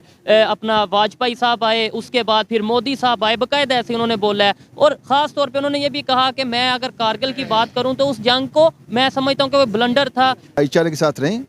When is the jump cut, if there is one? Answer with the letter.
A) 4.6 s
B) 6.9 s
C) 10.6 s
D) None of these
C